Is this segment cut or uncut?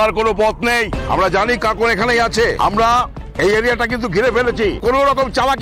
cut